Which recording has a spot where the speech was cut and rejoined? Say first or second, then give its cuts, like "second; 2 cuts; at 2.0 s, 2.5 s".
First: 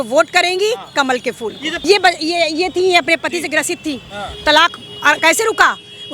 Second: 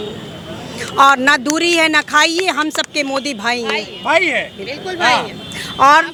first; 1 cut; at 1.7 s